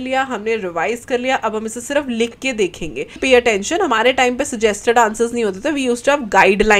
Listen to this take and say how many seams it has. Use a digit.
1